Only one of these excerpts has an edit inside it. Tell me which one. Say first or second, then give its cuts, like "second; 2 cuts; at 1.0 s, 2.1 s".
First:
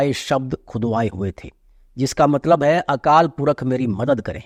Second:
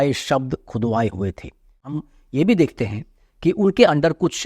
second; 1 cut; at 1.9 s